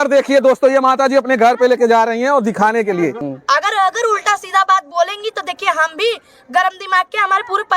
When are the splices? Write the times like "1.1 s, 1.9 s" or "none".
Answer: 3.3 s